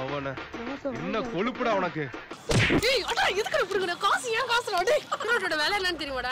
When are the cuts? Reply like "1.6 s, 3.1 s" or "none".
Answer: 5.2 s